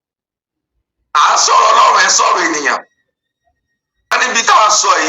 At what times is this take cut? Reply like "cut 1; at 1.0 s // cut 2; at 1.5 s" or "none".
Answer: cut 1; at 4.1 s